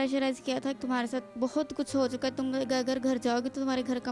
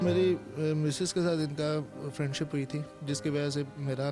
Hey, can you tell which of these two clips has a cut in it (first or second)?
first